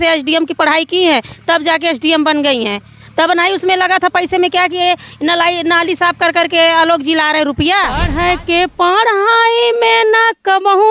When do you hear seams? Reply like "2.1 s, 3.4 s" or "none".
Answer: 8.1 s